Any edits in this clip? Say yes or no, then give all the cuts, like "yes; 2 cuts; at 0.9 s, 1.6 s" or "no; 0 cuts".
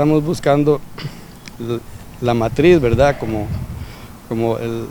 no; 0 cuts